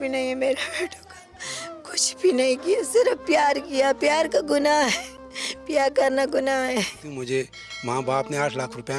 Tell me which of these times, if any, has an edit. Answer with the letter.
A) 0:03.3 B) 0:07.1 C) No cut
B